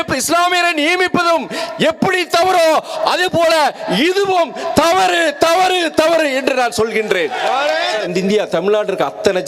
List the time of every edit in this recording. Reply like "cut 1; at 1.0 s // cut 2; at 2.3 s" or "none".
cut 1; at 8.0 s